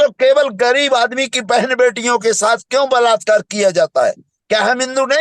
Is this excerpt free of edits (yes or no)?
yes